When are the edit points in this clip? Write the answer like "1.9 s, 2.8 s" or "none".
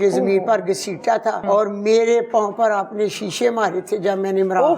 1.4 s